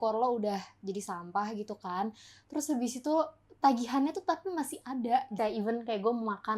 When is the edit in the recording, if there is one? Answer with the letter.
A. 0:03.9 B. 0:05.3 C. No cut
B